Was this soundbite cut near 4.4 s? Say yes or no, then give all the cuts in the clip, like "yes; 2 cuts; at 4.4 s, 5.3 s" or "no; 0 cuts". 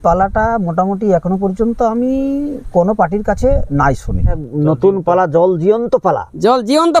yes; 1 cut; at 4.4 s